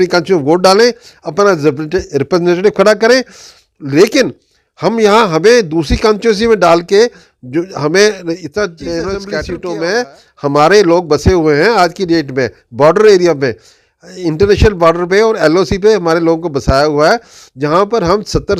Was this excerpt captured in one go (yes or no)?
no